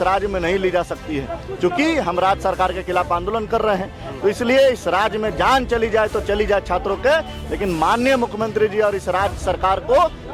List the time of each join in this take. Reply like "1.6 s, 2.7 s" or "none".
none